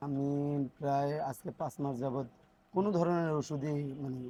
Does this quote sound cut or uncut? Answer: uncut